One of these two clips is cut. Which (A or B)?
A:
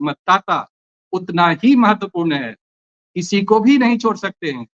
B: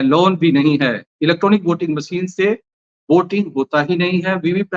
B